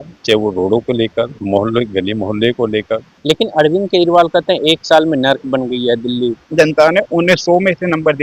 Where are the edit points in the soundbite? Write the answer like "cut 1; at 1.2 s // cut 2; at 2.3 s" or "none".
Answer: cut 1; at 1.4 s // cut 2; at 3.1 s // cut 3; at 6.4 s